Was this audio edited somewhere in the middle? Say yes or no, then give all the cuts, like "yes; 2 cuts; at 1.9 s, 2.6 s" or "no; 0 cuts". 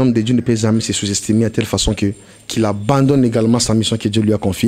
no; 0 cuts